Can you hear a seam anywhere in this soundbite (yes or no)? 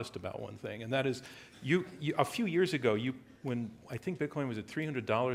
no